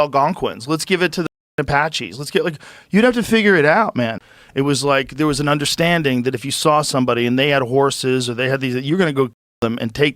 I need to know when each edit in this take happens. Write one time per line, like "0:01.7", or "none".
0:04.1